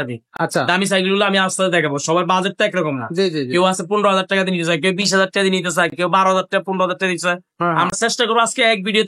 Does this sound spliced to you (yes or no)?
no